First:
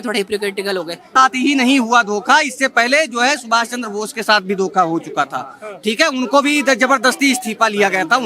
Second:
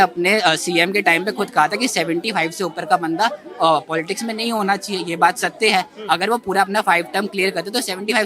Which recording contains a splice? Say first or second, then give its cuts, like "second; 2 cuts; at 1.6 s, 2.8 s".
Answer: first; 1 cut; at 1.1 s